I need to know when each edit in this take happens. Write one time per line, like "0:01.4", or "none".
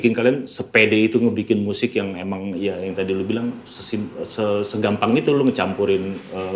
none